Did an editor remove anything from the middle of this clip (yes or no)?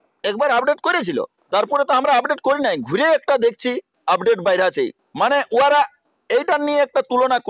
no